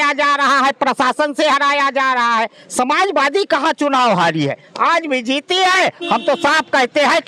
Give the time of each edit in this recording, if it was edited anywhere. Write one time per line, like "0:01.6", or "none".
none